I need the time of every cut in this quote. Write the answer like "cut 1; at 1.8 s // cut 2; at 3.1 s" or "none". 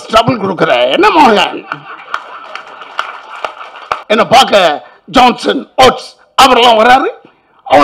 cut 1; at 4.0 s